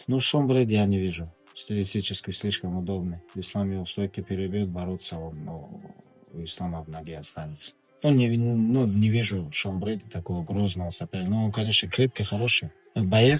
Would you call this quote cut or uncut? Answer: uncut